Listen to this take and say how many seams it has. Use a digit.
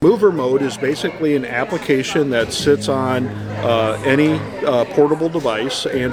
0